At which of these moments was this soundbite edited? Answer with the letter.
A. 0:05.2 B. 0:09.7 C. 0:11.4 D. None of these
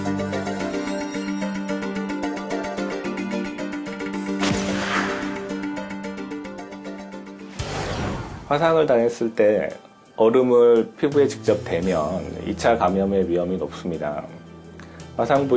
C